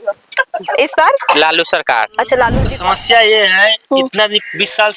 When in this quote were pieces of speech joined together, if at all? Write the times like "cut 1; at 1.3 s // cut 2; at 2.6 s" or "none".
cut 1; at 2.6 s